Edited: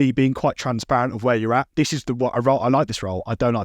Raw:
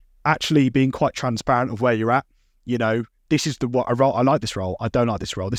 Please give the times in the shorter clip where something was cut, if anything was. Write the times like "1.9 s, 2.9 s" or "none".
1.7 s